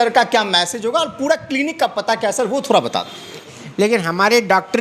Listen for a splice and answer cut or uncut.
cut